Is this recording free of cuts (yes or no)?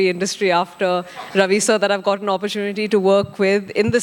yes